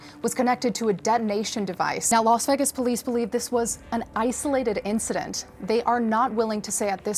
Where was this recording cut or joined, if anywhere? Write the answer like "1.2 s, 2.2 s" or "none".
none